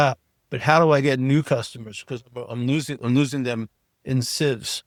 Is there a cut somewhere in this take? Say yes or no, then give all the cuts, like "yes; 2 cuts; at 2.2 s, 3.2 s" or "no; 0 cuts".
no; 0 cuts